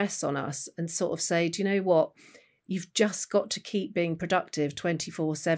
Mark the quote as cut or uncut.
uncut